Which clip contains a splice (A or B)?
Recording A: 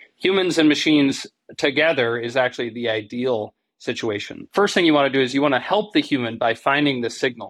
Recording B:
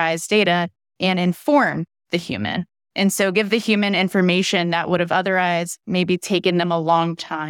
A